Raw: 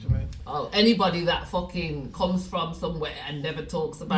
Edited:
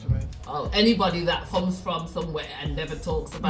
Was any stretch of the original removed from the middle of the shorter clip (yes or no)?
yes